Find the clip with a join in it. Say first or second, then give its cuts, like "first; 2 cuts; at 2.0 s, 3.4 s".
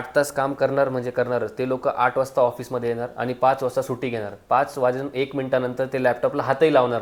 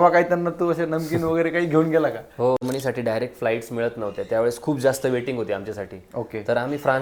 second; 1 cut; at 2.6 s